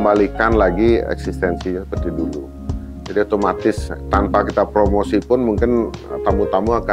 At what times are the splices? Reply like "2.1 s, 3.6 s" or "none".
none